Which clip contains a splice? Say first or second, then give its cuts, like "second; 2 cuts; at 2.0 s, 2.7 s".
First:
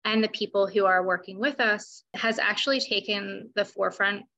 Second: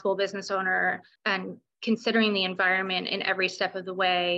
first; 1 cut; at 2.1 s